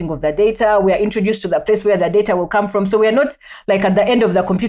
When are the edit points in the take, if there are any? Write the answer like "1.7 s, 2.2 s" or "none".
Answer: none